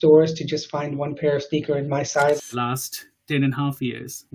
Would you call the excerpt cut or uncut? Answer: cut